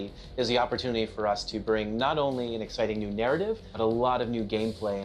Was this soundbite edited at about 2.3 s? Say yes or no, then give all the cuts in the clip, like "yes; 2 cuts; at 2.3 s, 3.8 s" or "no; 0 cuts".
no; 0 cuts